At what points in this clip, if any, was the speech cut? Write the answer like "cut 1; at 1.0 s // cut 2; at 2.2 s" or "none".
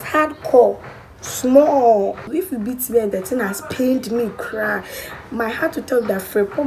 cut 1; at 2.2 s